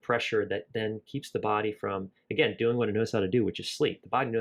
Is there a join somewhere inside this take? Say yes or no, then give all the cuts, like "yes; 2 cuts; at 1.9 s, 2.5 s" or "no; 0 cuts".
no; 0 cuts